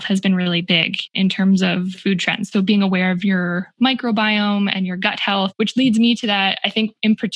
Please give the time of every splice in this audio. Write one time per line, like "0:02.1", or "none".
0:01.1
0:02.0
0:05.5

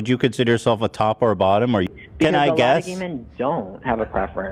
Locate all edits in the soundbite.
0:01.9

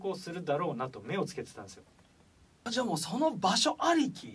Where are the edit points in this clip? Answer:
none

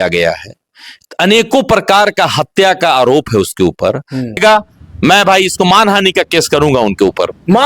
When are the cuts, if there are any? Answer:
0:04.4

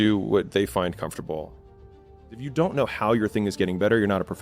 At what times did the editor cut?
0:02.0

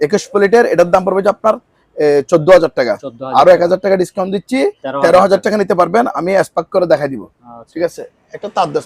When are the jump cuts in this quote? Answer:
none

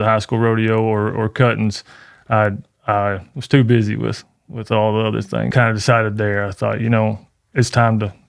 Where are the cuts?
0:05.5

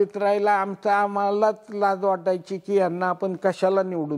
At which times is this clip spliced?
none

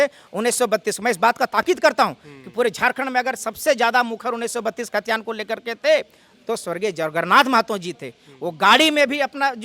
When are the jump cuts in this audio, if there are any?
none

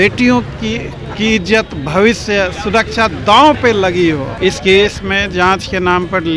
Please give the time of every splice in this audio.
0:04.3

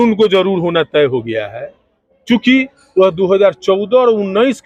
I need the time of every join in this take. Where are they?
none

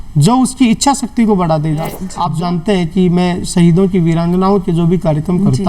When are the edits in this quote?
0:02.1

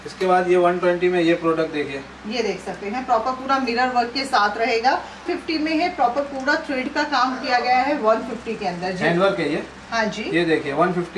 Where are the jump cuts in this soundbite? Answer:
0:05.3

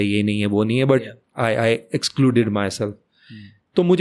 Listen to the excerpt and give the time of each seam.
none

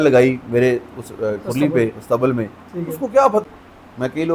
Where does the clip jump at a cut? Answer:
0:03.4

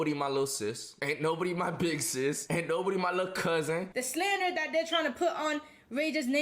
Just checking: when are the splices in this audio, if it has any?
0:00.9
0:02.4
0:04.0

